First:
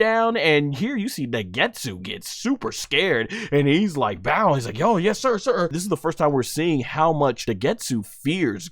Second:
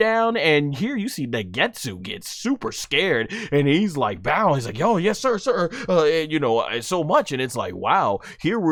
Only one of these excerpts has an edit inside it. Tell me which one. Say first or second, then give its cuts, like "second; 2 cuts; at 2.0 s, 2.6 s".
first; 2 cuts; at 5.8 s, 7.4 s